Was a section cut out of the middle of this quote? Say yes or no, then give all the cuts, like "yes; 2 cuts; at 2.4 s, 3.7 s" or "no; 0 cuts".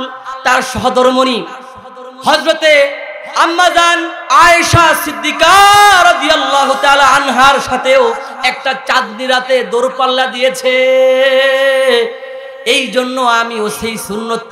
no; 0 cuts